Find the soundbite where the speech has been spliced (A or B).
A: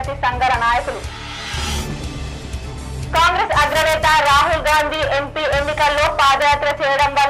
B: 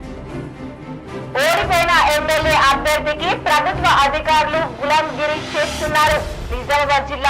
B